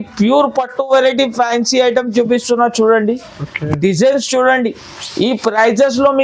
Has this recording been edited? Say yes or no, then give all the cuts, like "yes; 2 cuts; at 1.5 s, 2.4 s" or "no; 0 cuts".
no; 0 cuts